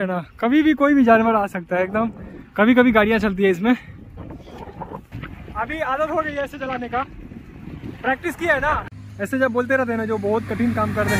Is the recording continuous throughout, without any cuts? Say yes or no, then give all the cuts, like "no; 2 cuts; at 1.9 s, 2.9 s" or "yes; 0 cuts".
no; 2 cuts; at 5.1 s, 9.0 s